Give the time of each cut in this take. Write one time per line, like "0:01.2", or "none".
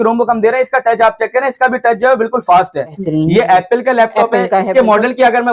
0:03.0